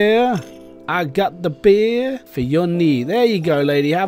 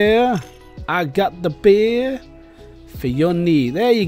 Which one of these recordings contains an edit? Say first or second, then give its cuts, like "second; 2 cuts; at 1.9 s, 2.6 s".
first; 1 cut; at 2.3 s